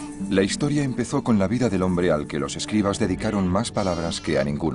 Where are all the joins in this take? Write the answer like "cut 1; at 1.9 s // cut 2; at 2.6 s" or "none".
cut 1; at 2.8 s